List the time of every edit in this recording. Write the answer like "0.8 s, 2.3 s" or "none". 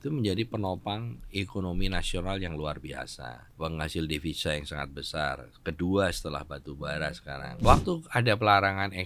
3.4 s, 7.6 s